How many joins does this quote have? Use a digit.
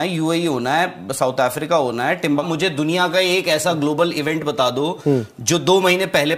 1